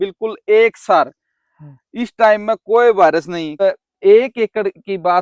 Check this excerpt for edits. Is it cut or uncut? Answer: cut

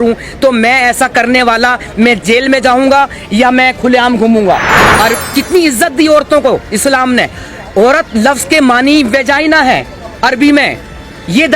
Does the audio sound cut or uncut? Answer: cut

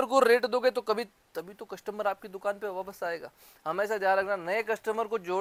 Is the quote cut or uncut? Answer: uncut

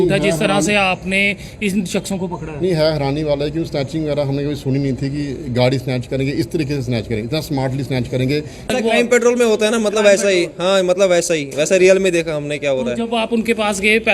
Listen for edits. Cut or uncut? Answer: cut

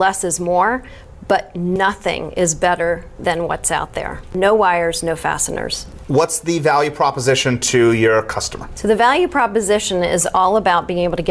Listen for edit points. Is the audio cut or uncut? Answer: uncut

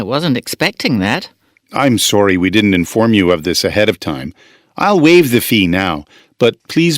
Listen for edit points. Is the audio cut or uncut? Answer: cut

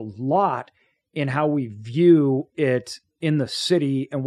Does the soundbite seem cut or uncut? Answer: uncut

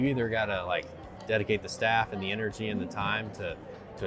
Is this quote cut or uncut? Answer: uncut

